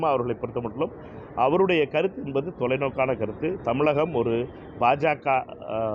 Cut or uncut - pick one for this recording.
uncut